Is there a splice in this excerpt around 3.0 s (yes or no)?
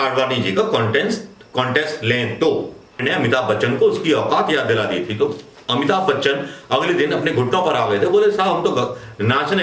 yes